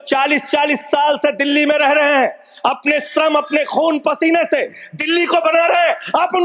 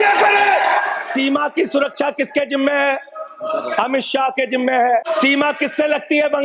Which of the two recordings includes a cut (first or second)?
second